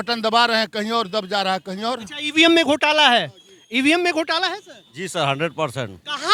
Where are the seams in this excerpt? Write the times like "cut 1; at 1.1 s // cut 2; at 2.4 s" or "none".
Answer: none